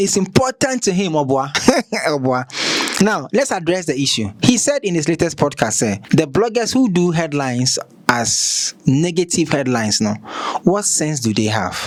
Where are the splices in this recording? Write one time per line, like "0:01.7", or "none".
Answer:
none